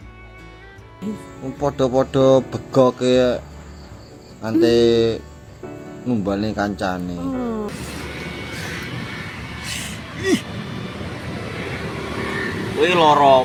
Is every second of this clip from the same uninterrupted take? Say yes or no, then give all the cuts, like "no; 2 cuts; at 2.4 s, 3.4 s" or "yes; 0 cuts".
yes; 0 cuts